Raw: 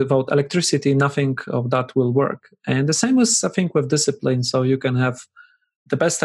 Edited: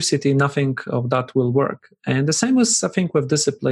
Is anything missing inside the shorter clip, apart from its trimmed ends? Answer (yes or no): no